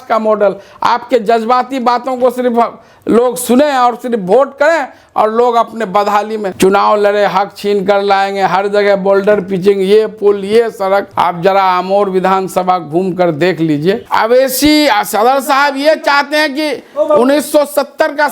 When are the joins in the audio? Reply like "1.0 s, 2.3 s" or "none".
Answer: 6.5 s, 14.1 s